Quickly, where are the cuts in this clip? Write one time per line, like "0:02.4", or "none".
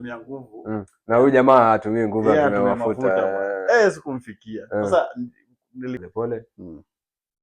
0:06.0